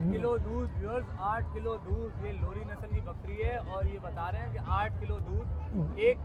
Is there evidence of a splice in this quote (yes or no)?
no